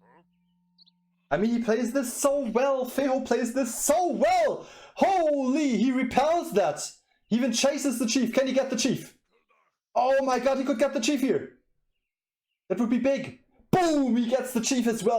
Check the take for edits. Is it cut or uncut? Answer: uncut